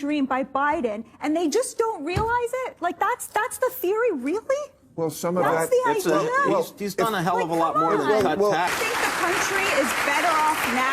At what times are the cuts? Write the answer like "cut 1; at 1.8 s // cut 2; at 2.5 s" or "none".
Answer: cut 1; at 8.7 s

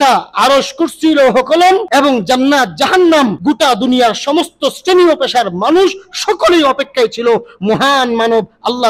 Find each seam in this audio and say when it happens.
cut 1; at 1.9 s // cut 2; at 3.4 s

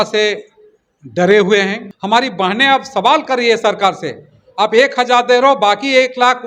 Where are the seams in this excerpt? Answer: cut 1; at 1.9 s

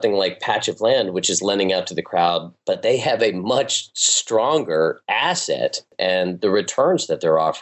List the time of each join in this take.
cut 1; at 2.5 s // cut 2; at 6.0 s

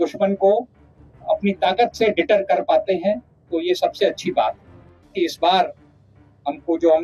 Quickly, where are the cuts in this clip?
cut 1; at 5.1 s

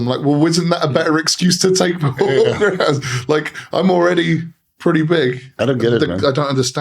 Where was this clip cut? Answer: cut 1; at 5.5 s

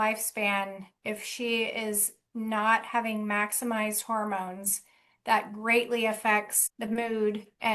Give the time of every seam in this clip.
none

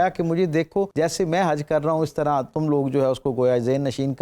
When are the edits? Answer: cut 1; at 0.9 s

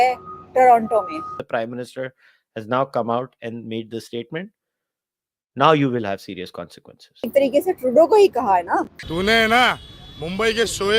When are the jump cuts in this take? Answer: cut 1; at 1.4 s // cut 2; at 7.3 s

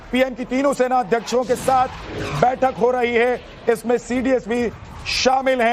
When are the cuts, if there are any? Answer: cut 1; at 1.1 s

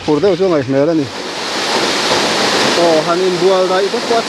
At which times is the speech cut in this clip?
cut 1; at 1.4 s

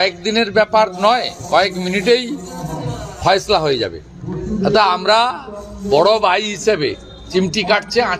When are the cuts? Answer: none

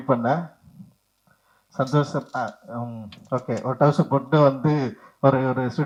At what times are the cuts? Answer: none

